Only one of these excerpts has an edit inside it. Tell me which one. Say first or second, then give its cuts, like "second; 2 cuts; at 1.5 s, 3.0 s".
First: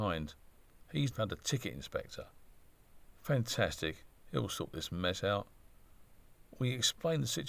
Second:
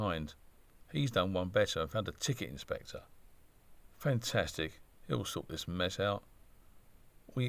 first; 1 cut; at 1.1 s